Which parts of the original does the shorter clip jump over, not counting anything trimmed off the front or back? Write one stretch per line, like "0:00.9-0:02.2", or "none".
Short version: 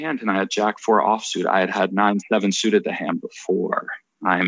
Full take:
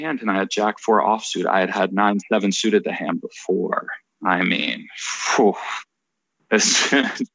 none